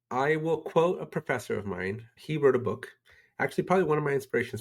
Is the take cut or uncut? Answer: cut